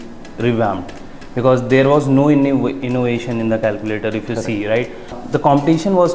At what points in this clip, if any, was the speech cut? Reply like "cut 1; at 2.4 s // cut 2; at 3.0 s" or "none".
cut 1; at 5.2 s